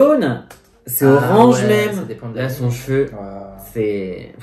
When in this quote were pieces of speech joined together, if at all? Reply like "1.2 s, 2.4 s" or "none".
2.2 s

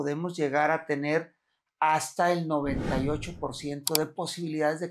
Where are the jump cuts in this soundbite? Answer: none

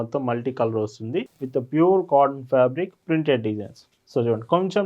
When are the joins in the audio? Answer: 1.4 s

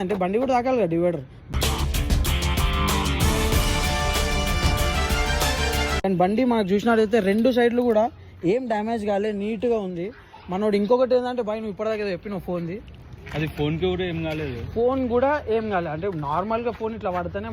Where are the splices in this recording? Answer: none

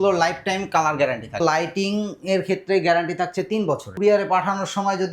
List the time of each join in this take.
1.4 s, 3.9 s

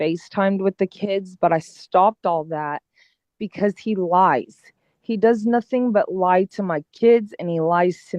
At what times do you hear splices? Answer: none

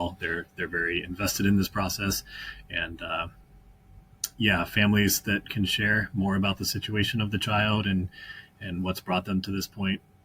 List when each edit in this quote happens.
none

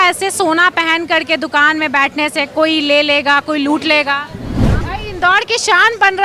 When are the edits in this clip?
4.8 s

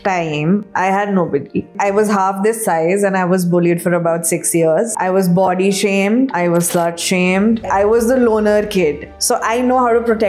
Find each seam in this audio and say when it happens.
4.9 s, 6.3 s, 7.6 s, 9.2 s

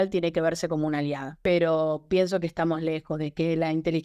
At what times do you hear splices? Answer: 1.3 s

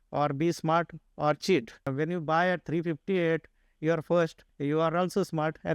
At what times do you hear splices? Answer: 1.9 s, 4.5 s

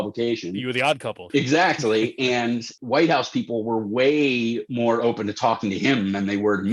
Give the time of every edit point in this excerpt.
1.1 s, 2.7 s

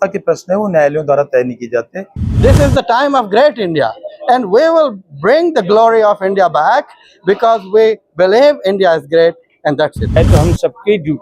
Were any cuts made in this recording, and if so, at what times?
2.2 s, 10.2 s

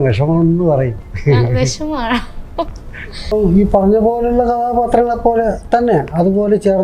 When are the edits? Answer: 3.3 s

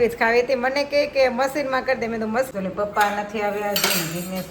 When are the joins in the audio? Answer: 2.5 s

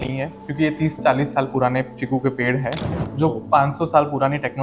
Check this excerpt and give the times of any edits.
3.0 s

